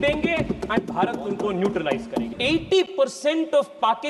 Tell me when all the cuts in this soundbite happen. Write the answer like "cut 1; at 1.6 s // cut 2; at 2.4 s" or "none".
cut 1; at 2.3 s